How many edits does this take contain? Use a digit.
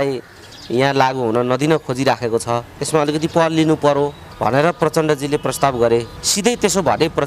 3